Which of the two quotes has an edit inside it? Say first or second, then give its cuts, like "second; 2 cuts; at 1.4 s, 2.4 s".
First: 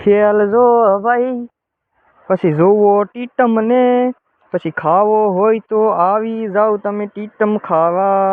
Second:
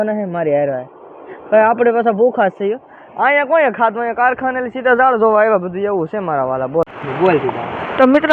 second; 1 cut; at 6.9 s